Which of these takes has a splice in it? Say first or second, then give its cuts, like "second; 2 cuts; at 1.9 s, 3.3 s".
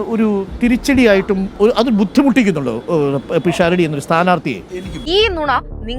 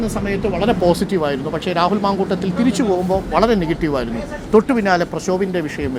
first; 1 cut; at 4.9 s